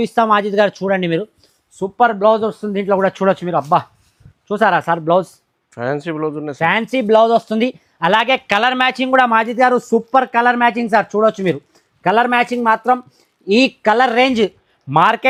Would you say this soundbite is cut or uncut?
uncut